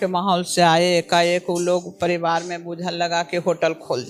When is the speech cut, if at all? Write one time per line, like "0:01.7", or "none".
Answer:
none